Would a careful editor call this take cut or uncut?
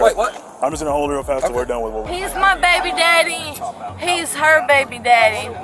cut